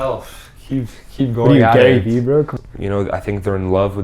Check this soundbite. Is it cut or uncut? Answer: cut